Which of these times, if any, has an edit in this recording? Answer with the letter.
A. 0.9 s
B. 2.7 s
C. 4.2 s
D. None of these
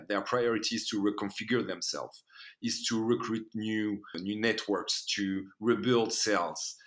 C